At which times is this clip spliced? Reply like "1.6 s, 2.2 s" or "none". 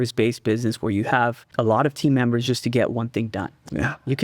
1.4 s